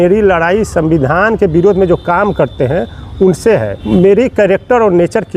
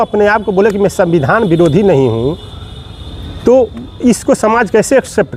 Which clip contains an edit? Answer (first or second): first